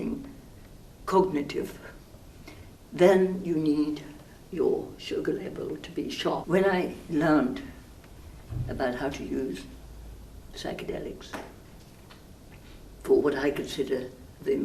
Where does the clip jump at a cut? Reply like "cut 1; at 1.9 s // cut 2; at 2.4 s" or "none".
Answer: cut 1; at 6.4 s